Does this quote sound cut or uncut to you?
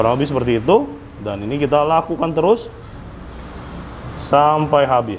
uncut